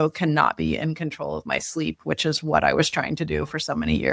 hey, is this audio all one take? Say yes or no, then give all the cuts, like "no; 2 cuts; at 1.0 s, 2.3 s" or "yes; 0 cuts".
yes; 0 cuts